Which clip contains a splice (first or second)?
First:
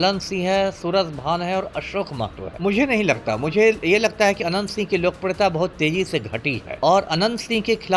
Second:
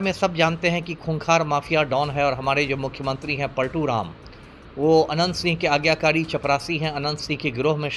first